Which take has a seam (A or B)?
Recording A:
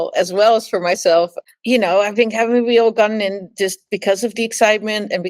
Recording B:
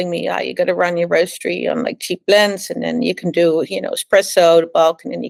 A